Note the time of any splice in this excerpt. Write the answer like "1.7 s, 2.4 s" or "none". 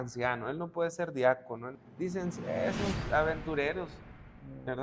1.7 s

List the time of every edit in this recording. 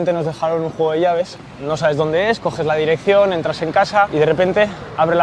1.3 s, 4.1 s

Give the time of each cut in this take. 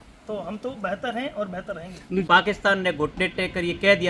2.2 s

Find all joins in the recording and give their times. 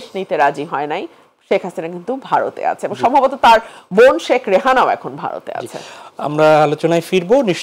none

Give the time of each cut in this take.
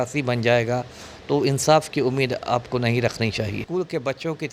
3.6 s

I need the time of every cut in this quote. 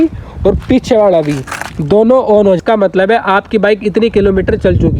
2.6 s

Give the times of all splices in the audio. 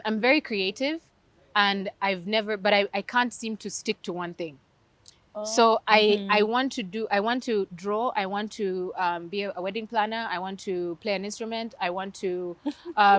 none

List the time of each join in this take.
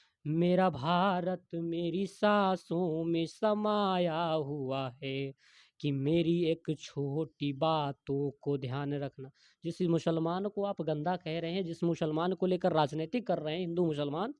none

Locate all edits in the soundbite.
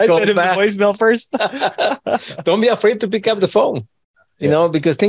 none

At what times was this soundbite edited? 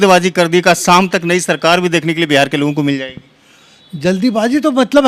none

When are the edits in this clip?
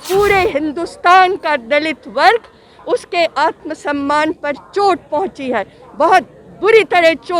none

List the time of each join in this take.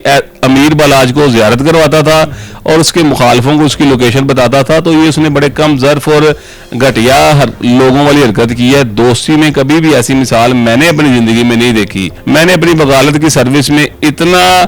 12.1 s

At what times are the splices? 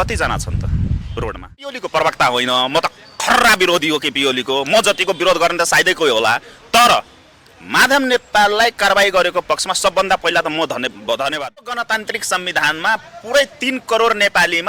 1.8 s, 11.8 s

